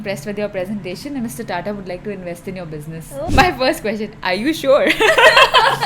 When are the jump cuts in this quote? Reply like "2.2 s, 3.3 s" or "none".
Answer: 3.3 s